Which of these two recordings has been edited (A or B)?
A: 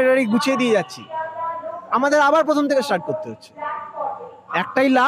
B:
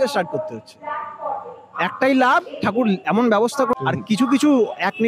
B